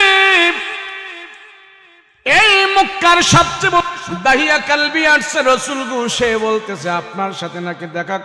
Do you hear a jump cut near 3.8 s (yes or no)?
yes